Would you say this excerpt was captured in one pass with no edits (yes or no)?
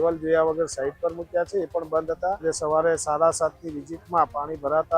no